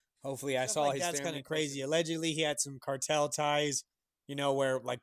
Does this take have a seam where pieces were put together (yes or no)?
yes